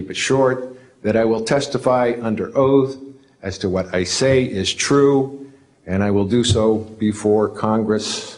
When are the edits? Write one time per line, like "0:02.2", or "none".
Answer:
none